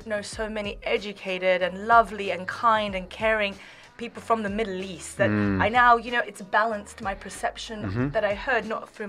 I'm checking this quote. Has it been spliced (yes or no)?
no